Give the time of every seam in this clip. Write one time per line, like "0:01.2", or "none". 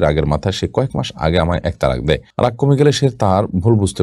none